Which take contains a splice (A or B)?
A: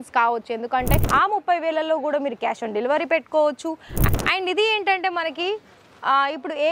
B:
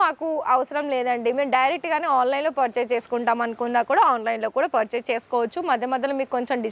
A